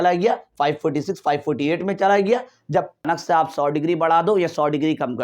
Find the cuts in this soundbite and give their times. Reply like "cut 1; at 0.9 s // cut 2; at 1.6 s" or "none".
cut 1; at 3.1 s